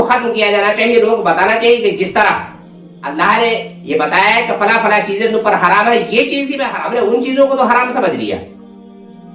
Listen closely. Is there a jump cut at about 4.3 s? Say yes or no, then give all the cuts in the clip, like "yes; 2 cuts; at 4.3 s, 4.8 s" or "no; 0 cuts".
no; 1 cut; at 6.6 s